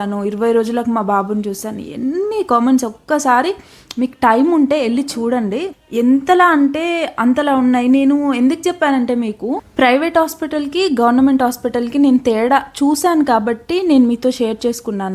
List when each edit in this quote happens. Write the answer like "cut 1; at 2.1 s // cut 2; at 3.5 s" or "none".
none